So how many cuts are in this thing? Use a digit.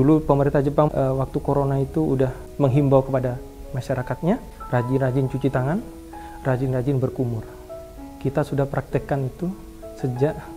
3